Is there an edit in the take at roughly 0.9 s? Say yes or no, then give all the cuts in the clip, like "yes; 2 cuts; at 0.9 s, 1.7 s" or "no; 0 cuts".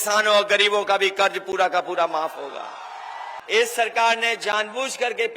no; 1 cut; at 3.4 s